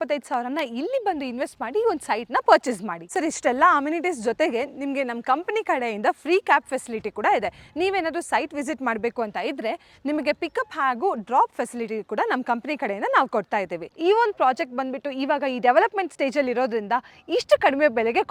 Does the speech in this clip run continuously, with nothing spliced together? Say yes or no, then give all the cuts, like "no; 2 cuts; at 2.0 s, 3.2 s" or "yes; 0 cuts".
yes; 0 cuts